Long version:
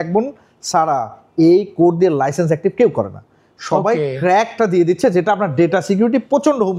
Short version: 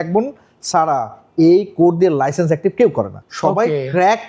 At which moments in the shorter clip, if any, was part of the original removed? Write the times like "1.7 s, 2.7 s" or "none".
3.2 s